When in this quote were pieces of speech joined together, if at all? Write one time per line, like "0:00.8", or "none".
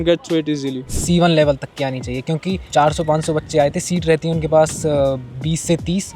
0:00.8
0:02.6

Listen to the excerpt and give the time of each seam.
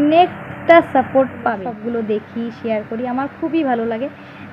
0:01.5

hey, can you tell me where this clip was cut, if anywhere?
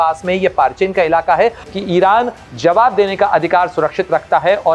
0:01.7

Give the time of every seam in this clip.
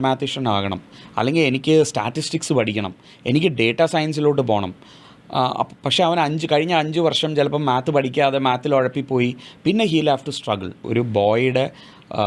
0:10.9

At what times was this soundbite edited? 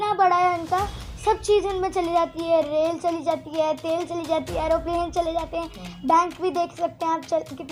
none

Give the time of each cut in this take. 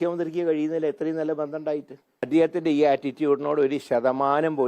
0:02.1

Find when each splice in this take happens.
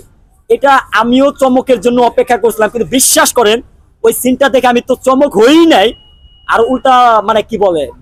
none

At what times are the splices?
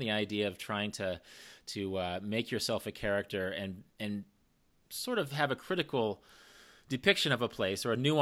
none

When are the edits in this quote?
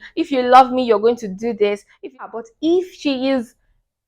0:02.3

